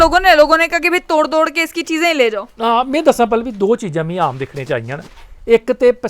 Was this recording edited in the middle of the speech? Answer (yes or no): no